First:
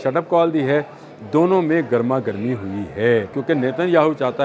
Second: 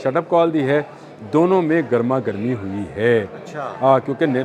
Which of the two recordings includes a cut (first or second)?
first